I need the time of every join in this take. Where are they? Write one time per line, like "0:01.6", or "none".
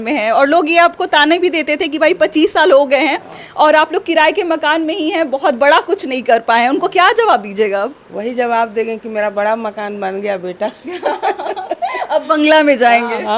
none